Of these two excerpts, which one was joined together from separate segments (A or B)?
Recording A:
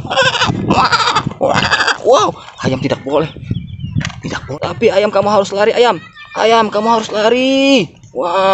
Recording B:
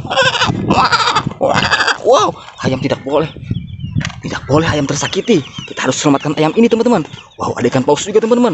A